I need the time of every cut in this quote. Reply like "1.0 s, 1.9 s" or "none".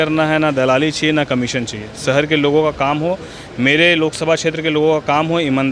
none